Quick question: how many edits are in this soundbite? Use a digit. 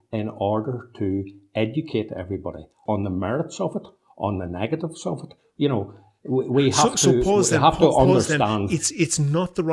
1